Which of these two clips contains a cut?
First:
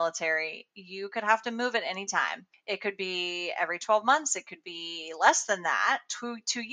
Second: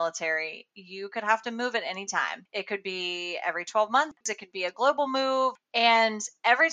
second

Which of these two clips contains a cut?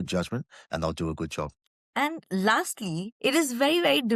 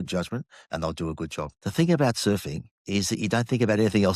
second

